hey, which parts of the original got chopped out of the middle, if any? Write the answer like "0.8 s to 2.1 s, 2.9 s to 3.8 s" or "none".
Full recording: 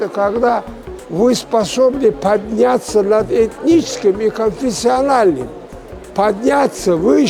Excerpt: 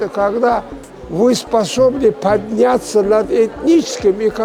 none